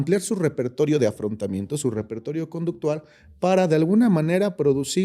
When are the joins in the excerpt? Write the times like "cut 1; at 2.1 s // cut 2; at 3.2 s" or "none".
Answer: none